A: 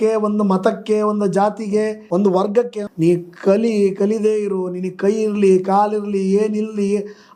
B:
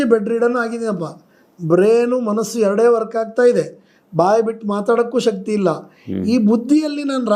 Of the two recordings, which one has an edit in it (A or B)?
A